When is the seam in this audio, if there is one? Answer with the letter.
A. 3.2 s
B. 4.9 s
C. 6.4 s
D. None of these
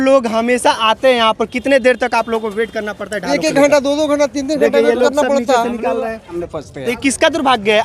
C